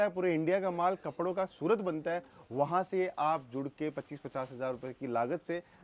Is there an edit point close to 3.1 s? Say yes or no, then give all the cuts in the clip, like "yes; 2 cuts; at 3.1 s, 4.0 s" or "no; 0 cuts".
no; 0 cuts